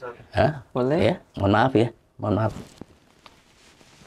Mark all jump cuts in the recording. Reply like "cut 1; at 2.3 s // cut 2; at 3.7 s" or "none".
none